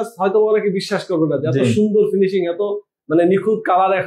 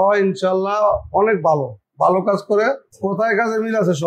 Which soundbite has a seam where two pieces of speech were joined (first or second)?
second